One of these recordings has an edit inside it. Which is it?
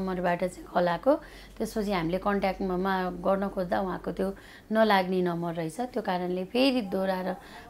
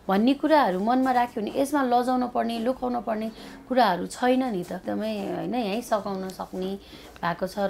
second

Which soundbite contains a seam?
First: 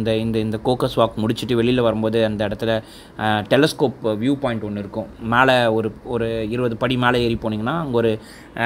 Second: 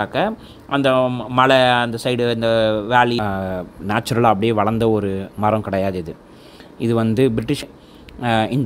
second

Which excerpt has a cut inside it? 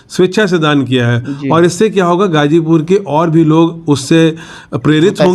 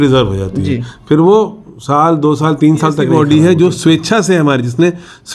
second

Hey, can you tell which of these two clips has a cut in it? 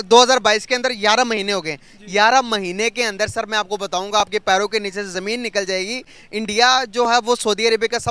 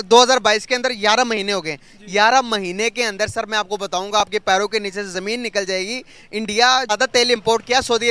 second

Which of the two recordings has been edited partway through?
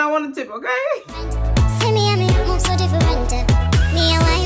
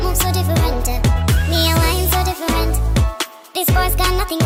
first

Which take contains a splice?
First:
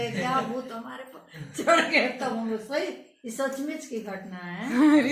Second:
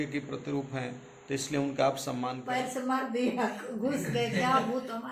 second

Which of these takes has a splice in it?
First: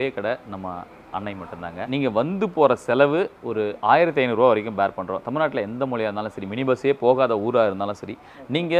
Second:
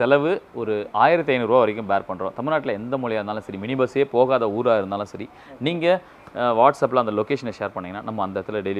first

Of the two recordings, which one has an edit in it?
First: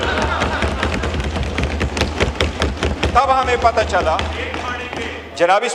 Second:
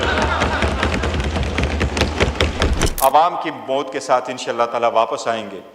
second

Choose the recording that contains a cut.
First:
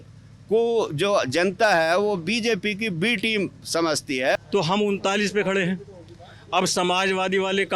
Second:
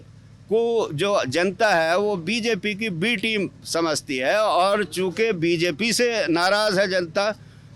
first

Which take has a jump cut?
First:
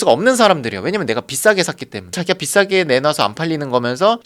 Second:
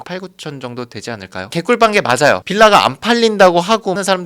second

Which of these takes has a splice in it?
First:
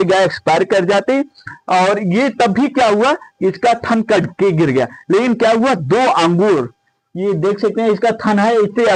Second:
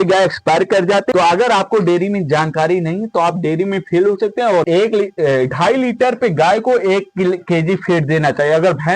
second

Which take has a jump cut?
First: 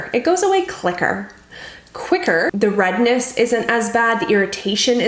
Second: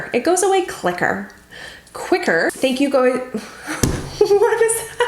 second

